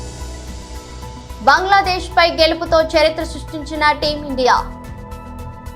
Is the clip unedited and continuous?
yes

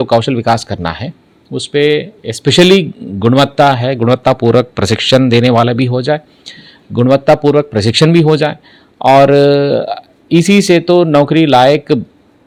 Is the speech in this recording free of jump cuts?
yes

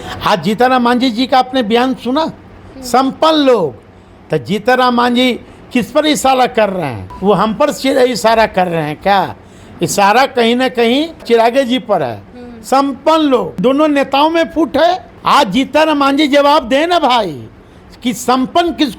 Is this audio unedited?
no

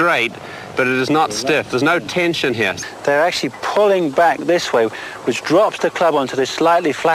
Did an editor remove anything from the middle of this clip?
yes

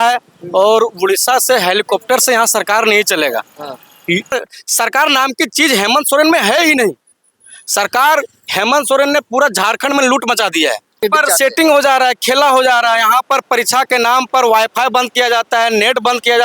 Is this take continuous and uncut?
no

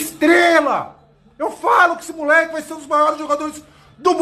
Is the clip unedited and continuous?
yes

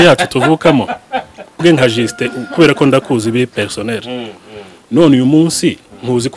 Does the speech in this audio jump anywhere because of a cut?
yes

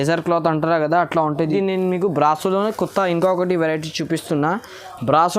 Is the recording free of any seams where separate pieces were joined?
no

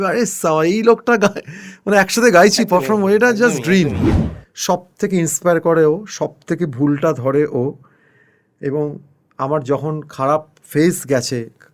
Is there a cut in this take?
yes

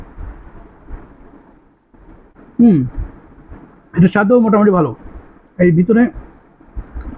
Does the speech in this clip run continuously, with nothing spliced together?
no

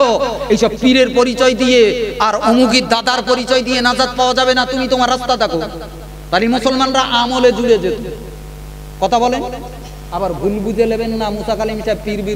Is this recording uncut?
yes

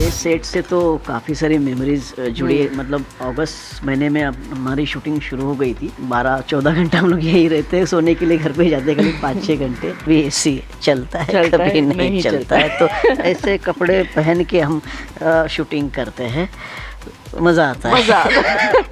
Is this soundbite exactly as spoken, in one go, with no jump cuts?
no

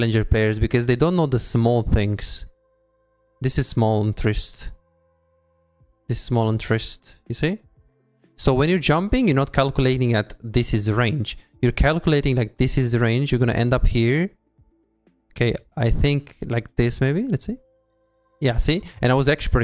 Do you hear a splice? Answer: no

